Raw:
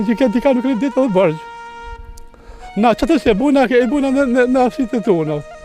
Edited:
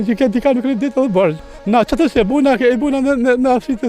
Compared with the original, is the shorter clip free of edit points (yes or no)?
no